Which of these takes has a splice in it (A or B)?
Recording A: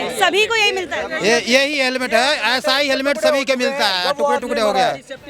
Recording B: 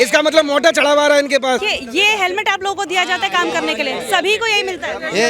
B